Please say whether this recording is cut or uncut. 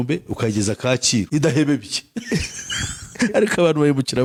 uncut